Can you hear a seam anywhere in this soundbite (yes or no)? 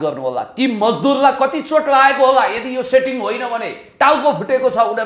no